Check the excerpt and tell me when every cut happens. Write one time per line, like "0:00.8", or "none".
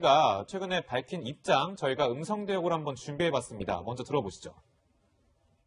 none